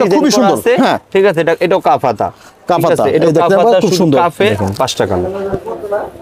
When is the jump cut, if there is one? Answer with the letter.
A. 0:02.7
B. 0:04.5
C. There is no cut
B